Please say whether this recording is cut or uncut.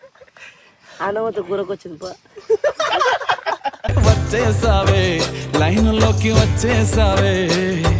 uncut